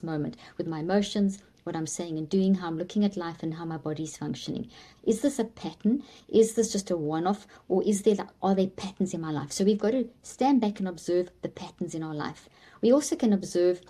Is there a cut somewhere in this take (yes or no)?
no